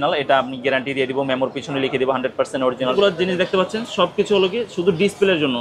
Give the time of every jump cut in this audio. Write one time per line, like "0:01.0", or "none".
0:03.0